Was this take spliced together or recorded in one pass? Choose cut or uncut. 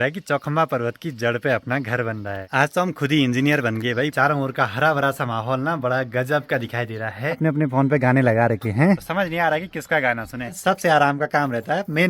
cut